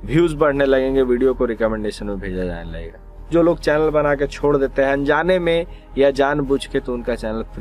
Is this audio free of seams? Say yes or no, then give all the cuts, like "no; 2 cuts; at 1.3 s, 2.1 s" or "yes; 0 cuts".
no; 1 cut; at 3.3 s